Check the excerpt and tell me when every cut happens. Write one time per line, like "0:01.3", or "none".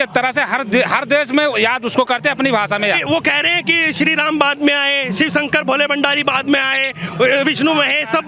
0:03.0